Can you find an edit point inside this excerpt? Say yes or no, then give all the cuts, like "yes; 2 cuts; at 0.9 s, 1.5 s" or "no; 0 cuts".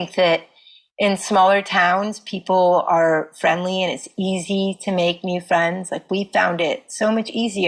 no; 0 cuts